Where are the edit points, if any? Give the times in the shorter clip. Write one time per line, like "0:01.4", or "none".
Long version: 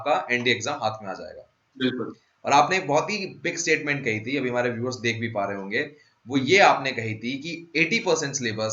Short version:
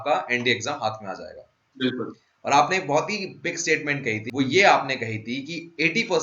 0:04.2